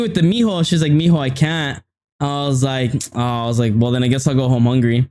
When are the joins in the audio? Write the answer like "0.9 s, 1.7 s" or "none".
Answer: none